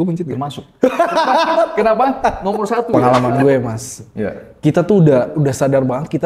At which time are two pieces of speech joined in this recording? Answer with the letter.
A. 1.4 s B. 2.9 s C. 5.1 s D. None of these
B